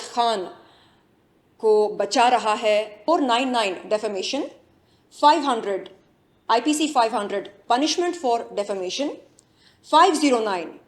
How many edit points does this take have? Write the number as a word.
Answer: one